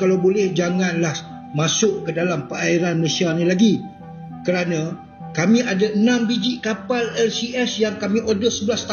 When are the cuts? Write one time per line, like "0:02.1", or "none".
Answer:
none